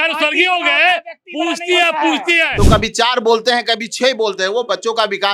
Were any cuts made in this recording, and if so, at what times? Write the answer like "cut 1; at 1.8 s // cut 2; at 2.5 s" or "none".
cut 1; at 2.5 s